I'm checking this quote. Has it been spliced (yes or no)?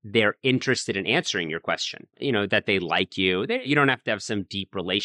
yes